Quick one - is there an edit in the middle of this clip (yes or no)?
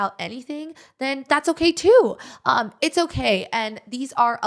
no